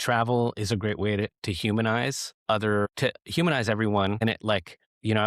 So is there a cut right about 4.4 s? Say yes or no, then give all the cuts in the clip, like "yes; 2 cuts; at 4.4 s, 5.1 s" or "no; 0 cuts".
yes; 3 cuts; at 2.3 s, 2.9 s, 4.4 s